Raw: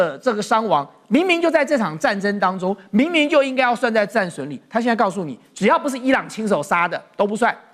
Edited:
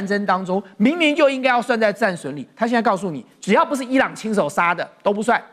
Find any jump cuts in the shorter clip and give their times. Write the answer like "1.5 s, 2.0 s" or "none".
none